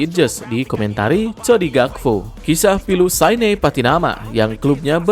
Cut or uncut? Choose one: cut